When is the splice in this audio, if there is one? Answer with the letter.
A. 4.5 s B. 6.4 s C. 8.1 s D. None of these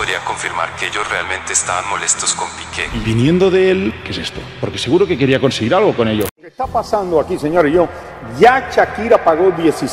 B